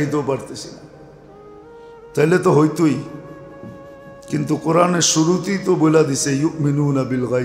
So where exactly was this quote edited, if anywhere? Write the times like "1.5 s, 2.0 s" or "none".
none